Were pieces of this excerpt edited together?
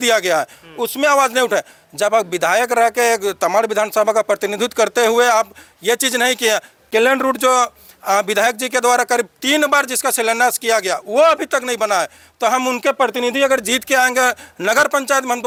no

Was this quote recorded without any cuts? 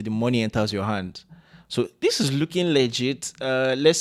yes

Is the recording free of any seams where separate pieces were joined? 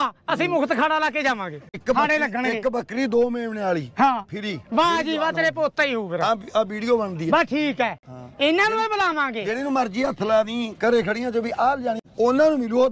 no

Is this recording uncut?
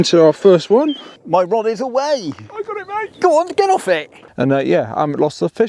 no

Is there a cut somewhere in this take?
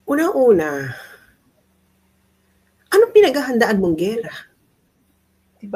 no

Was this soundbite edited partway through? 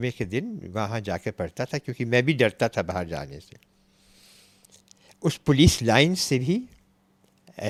no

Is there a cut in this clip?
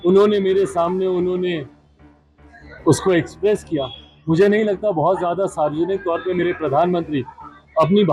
no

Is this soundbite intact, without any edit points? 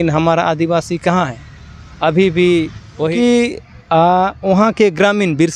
no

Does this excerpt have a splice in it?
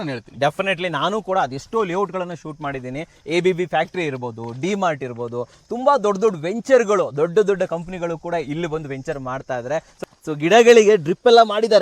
yes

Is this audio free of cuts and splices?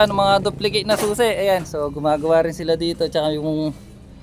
yes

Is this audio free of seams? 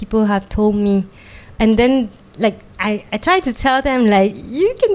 no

